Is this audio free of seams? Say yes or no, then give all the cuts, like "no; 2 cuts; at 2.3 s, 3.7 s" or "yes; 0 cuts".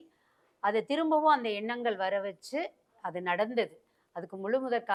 yes; 0 cuts